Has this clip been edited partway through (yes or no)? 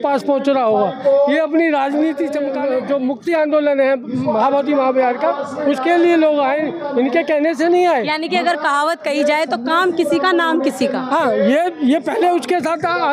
yes